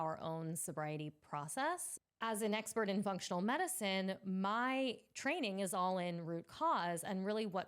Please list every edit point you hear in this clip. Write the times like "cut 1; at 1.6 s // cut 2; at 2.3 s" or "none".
cut 1; at 1.9 s

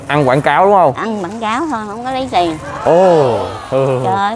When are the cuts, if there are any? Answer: none

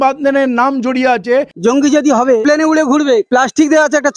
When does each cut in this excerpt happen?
cut 1; at 1.5 s // cut 2; at 2.4 s // cut 3; at 3.3 s

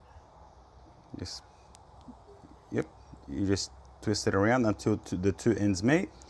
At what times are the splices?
none

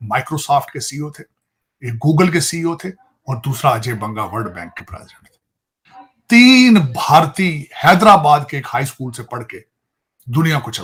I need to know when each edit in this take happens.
none

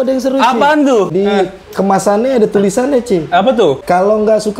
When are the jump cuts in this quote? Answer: cut 1; at 1.1 s // cut 2; at 3.8 s

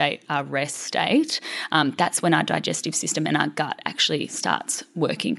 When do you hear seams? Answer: none

